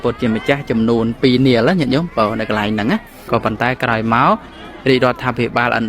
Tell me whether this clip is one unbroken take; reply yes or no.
no